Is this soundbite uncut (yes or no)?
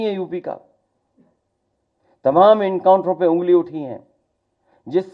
yes